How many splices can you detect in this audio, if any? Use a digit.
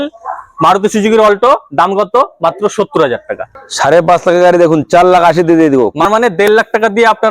2